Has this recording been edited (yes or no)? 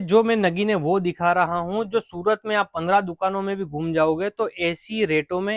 no